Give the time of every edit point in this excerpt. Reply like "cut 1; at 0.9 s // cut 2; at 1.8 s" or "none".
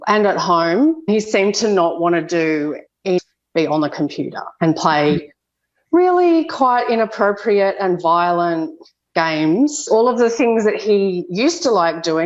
cut 1; at 1.1 s // cut 2; at 3.2 s // cut 3; at 9.9 s

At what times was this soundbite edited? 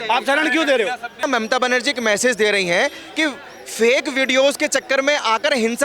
cut 1; at 1.2 s

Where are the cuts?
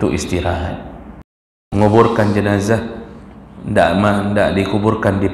cut 1; at 1.7 s

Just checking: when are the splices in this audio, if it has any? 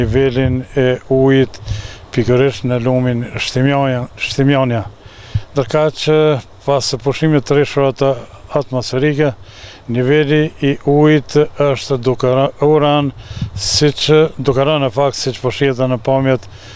none

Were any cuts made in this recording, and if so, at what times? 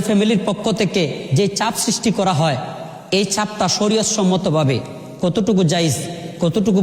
none

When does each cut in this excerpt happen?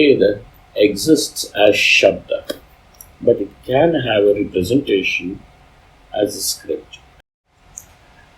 cut 1; at 7.0 s

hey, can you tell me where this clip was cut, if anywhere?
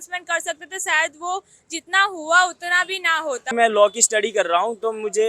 cut 1; at 3.5 s

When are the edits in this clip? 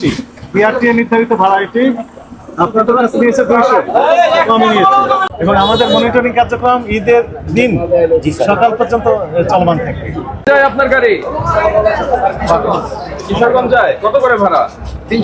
cut 1; at 5.2 s // cut 2; at 10.4 s

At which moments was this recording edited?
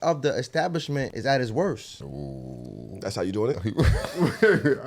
cut 1; at 1.1 s // cut 2; at 2.0 s

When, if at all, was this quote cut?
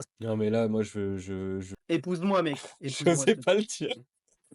cut 1; at 1.7 s

